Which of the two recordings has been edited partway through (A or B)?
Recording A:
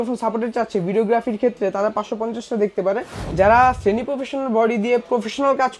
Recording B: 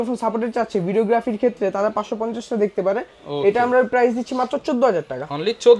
A